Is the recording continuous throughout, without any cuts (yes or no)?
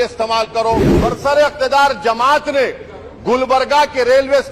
no